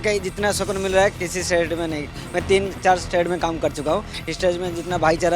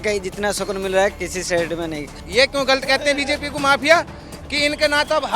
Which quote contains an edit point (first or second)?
second